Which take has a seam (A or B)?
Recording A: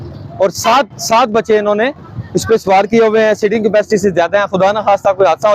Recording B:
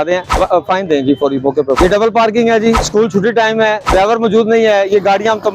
B